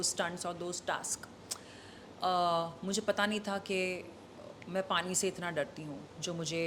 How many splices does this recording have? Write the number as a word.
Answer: zero